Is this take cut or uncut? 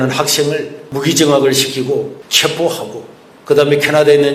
uncut